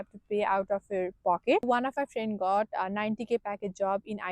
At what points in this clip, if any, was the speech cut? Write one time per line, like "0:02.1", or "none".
0:01.7